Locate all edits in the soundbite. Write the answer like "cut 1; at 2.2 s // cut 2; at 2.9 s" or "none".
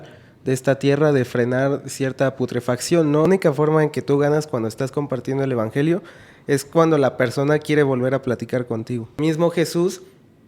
cut 1; at 3.3 s // cut 2; at 9.2 s